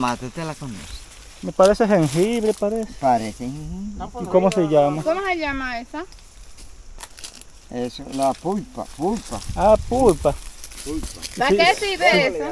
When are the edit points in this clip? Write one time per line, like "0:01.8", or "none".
none

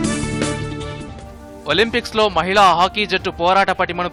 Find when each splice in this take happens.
none

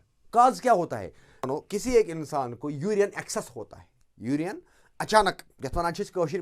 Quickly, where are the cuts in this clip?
0:01.5

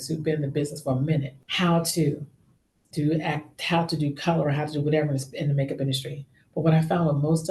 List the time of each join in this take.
0:01.4

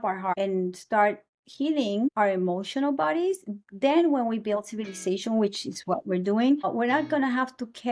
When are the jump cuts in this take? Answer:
none

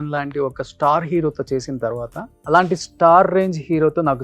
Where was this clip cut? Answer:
0:02.3

